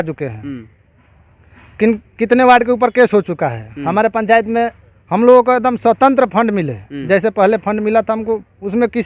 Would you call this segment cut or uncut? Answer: uncut